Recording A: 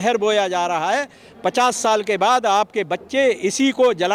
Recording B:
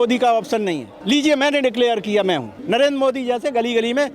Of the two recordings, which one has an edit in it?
B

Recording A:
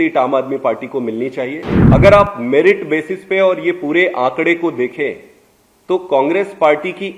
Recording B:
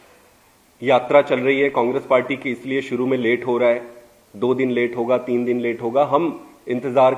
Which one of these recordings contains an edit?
A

